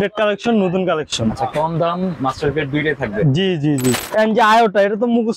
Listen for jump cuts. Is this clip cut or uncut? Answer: cut